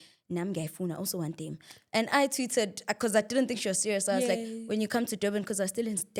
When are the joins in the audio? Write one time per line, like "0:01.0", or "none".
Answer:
none